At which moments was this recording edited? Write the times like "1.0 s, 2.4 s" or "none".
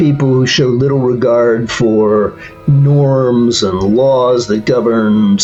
none